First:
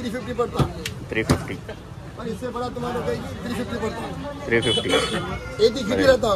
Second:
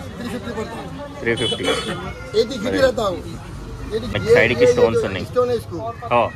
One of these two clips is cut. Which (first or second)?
second